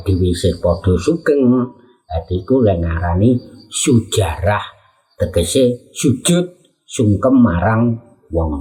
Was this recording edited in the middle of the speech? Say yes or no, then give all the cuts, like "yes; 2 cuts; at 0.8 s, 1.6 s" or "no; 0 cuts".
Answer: no; 0 cuts